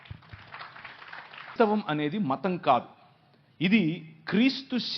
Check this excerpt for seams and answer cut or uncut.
cut